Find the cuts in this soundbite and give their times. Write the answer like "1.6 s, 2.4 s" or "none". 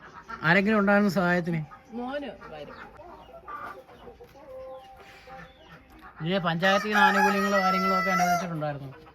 3.0 s